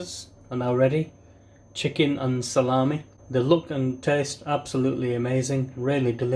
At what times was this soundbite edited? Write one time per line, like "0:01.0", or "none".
0:03.1